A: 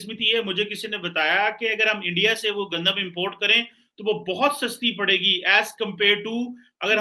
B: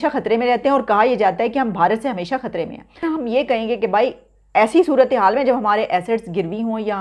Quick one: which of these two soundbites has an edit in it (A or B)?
B